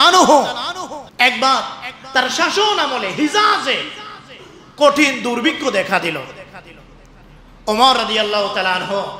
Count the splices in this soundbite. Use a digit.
1